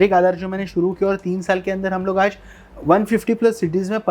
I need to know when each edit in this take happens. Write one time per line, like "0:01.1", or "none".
none